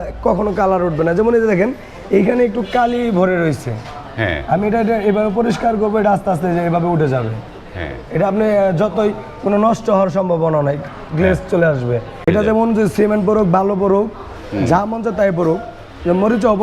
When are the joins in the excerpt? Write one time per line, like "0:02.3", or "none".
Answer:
0:12.3